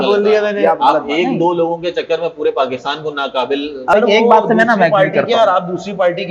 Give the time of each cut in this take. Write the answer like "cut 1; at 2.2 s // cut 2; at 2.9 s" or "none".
cut 1; at 3.9 s